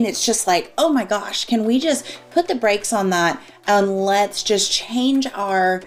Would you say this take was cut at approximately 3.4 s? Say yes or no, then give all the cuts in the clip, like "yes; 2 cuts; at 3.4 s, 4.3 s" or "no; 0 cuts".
no; 0 cuts